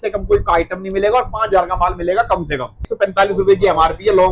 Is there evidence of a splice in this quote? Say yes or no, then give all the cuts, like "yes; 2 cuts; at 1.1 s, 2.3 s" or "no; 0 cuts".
yes; 1 cut; at 2.9 s